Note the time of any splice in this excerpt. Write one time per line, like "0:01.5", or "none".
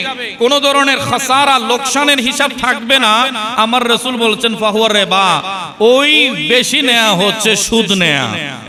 none